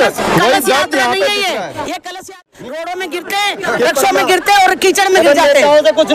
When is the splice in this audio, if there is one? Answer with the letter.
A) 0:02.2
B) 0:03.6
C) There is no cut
A